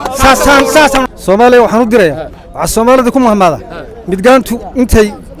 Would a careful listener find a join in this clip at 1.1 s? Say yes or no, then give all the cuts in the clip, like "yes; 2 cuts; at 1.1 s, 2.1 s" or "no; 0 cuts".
yes; 1 cut; at 1.1 s